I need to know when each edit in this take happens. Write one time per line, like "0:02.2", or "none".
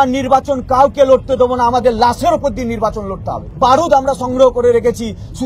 0:03.4